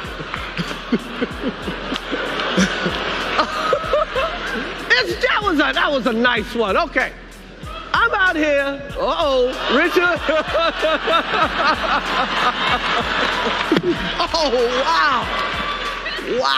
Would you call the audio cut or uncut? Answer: cut